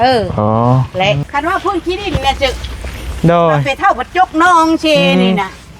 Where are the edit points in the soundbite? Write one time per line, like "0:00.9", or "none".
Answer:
0:01.2